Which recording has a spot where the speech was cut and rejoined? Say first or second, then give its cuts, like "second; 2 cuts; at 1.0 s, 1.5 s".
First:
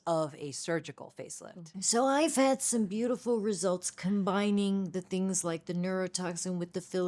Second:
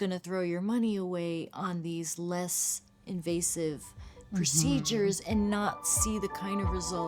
first; 1 cut; at 1.5 s